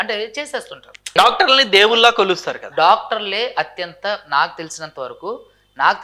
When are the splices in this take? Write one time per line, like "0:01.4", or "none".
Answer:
0:01.1